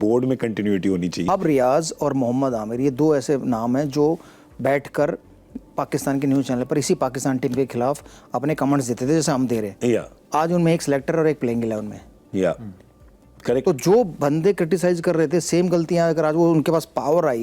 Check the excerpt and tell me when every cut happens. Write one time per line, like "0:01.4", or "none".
0:01.3